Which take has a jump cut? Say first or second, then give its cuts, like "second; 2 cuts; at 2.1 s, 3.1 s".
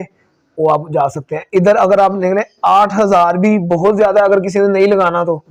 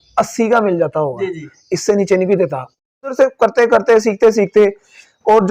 second; 1 cut; at 2.8 s